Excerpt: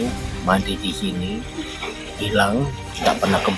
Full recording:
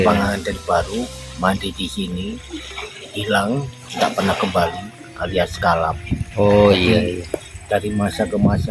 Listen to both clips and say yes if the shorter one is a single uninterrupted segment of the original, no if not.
yes